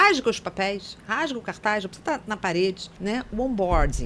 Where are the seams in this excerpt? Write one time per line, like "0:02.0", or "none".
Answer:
0:02.9